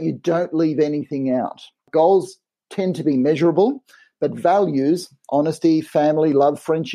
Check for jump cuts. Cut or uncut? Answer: cut